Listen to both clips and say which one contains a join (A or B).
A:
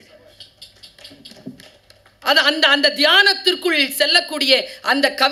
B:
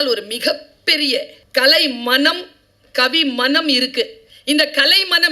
B